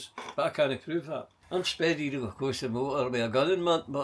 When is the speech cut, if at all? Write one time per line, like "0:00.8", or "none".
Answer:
0:01.3

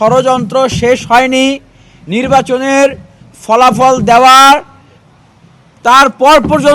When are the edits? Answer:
none

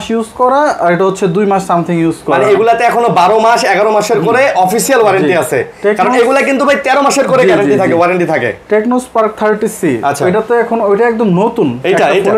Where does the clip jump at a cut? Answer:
none

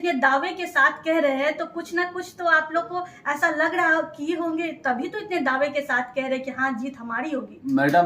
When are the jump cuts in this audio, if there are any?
none

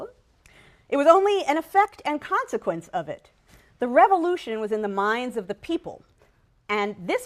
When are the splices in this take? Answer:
none

